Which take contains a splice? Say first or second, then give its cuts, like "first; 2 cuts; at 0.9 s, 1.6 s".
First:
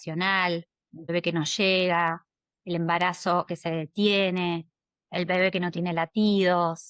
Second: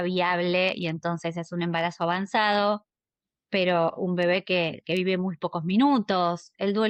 first; 1 cut; at 1.1 s